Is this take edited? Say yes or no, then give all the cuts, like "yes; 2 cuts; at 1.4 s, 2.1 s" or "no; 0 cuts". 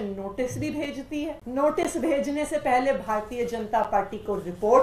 yes; 1 cut; at 1.4 s